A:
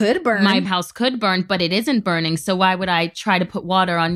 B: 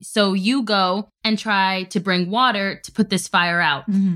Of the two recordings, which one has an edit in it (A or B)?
B